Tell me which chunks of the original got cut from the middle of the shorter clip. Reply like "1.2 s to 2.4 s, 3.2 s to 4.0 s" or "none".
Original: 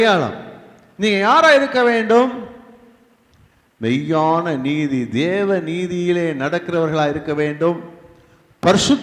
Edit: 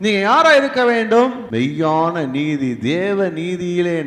2.4 s to 3.7 s

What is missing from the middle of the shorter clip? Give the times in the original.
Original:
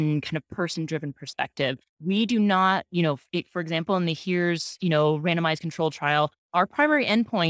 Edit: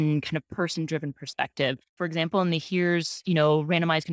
1.9 s to 3.5 s

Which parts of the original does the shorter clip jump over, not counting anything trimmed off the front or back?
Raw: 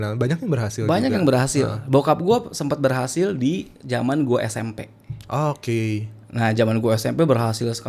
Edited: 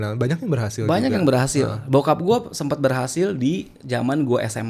none

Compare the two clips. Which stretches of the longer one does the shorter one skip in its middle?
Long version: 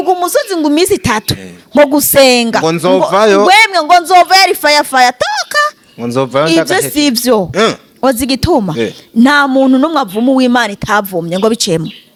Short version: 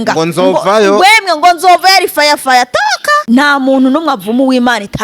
5.6 s to 9.0 s

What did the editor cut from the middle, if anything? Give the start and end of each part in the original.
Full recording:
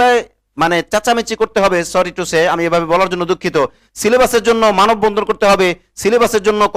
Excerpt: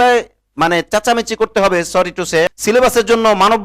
2.5 s to 3.9 s

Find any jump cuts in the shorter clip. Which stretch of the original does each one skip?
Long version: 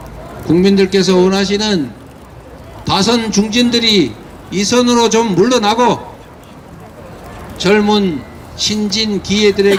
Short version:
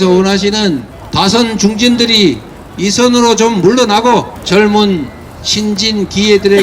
2.0 s to 2.7 s, 6.1 s to 7.5 s

